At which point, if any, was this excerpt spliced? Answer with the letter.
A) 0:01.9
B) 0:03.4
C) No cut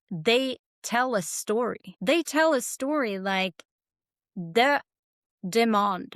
A